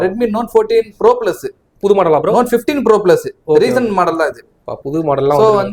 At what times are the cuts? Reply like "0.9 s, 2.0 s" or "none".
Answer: none